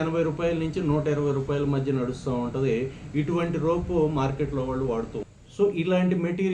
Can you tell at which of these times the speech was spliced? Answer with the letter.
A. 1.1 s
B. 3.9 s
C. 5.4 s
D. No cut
D